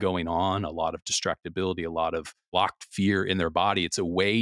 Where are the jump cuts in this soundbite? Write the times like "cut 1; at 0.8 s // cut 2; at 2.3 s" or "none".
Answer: cut 1; at 2.5 s